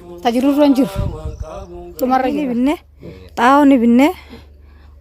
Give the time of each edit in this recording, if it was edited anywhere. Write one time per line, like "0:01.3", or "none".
0:02.5